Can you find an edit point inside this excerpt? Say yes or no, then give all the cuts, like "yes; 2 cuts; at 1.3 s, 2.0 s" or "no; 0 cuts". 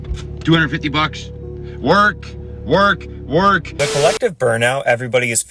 yes; 1 cut; at 3.7 s